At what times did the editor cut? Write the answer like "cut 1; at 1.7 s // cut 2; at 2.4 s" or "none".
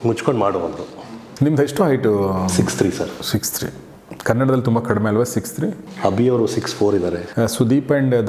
cut 1; at 0.9 s // cut 2; at 6.0 s // cut 3; at 7.2 s